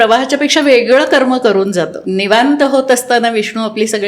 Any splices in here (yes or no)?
yes